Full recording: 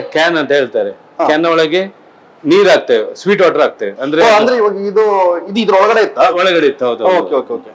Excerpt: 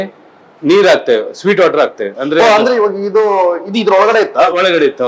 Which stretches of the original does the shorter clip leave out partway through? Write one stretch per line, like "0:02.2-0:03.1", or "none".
none